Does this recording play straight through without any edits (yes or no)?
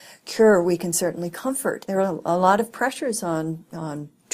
no